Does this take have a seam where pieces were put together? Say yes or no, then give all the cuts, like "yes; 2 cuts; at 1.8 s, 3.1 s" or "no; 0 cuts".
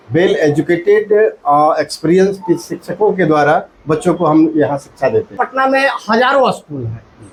no; 0 cuts